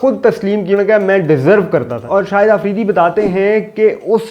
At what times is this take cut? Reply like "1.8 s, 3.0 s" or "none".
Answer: 0.7 s, 2.1 s